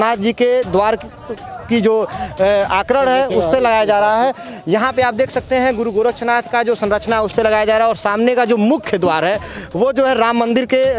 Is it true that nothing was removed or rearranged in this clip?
yes; 0 cuts

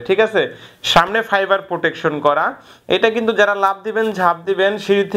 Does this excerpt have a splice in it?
no; 0 cuts

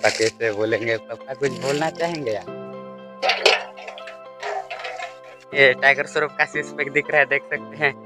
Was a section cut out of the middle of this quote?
yes; 1 cut; at 5.6 s

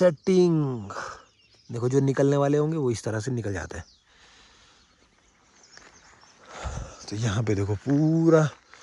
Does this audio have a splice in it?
no; 0 cuts

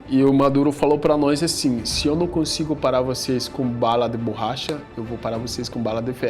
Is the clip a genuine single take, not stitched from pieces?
yes; 0 cuts

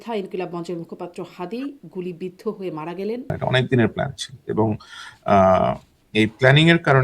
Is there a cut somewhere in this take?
yes; 1 cut; at 3.4 s

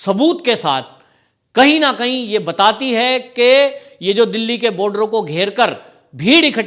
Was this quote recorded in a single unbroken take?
yes; 0 cuts

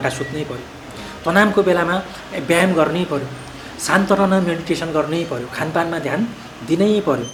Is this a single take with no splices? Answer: yes; 0 cuts

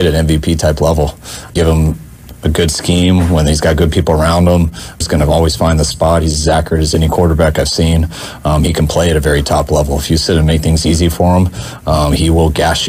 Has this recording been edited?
yes; 2 cuts; at 1.5 s, 5.0 s

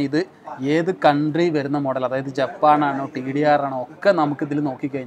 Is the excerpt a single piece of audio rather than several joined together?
yes; 0 cuts

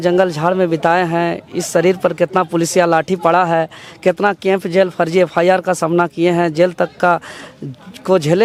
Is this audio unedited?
yes; 0 cuts

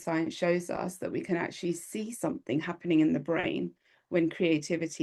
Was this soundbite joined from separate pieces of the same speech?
no; 0 cuts

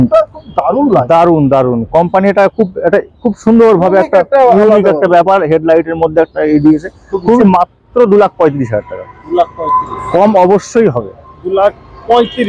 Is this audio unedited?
no; 1 cut; at 7.4 s

